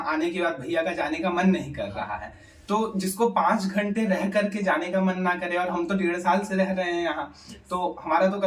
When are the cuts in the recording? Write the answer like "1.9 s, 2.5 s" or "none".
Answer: none